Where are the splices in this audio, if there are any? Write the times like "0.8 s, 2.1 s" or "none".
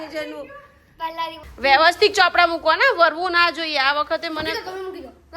1.4 s

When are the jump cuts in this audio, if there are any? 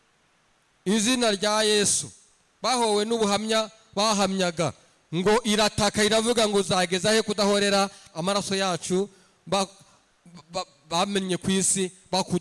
none

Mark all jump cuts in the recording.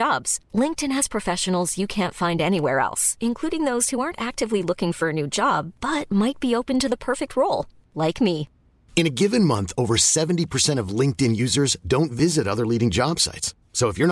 none

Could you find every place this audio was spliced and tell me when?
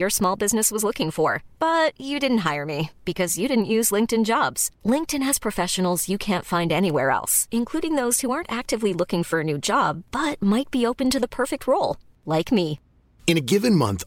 none

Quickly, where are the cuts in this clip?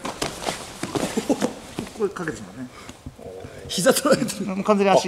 none

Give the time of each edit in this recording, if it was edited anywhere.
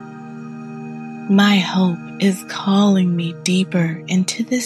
1.3 s

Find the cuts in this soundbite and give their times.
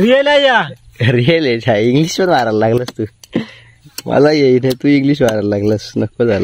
none

